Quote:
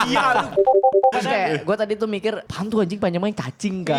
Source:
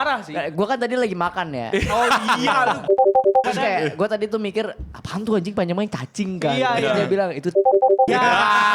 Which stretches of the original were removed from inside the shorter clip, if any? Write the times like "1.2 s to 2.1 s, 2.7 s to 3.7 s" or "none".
4.8 s to 5.1 s